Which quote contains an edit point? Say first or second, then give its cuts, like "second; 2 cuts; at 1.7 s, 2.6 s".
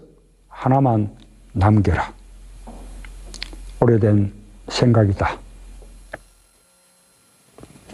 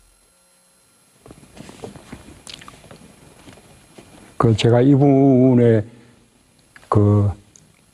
second; 1 cut; at 5.5 s